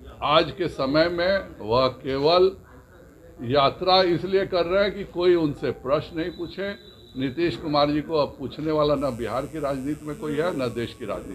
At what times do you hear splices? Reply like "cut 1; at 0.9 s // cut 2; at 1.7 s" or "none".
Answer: none